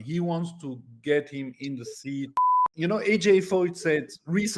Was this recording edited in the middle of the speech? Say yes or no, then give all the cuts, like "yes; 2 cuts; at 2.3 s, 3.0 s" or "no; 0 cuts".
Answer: yes; 1 cut; at 2.5 s